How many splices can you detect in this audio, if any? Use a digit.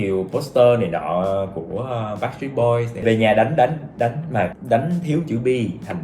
2